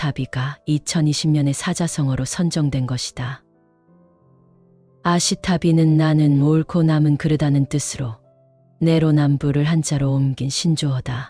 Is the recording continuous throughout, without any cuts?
no; 2 cuts; at 3.5 s, 4.9 s

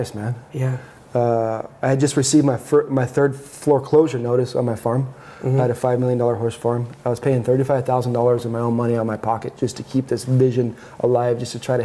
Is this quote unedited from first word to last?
yes; 0 cuts

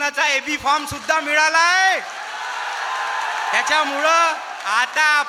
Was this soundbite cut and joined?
no; 0 cuts

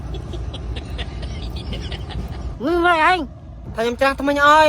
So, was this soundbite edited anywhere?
yes; 1 cut; at 2.5 s

